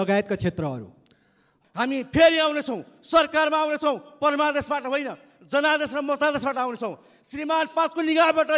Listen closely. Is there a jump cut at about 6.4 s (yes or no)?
no